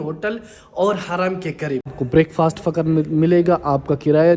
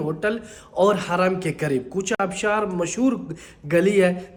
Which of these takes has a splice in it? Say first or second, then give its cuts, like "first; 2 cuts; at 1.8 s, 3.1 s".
first; 1 cut; at 1.9 s